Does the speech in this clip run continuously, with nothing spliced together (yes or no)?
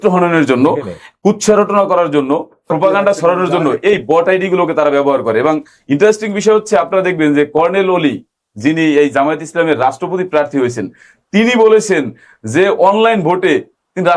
no